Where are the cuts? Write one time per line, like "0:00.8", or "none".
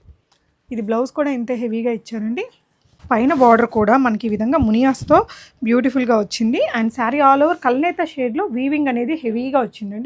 0:02.9